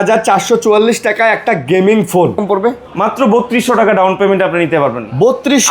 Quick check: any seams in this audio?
yes; 1 cut; at 2.4 s

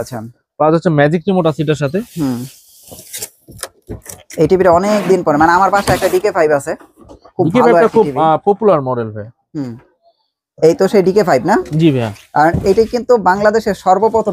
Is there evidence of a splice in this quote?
no; 0 cuts

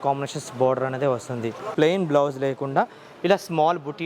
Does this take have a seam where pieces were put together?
yes; 1 cut; at 1.7 s

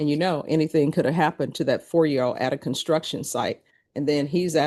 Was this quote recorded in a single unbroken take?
yes; 0 cuts

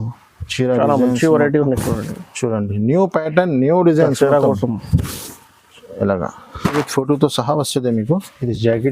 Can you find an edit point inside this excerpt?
yes; 1 cut; at 6.7 s

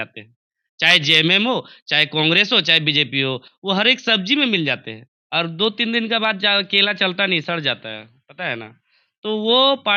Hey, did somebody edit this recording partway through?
no; 0 cuts

